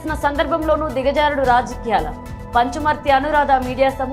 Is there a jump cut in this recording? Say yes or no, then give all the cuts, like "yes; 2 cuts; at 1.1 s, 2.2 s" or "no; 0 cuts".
no; 0 cuts